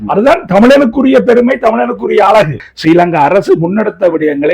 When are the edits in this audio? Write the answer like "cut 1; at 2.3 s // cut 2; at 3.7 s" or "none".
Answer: cut 1; at 2.7 s